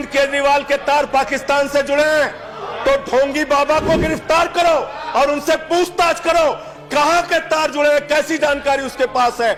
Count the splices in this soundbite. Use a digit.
0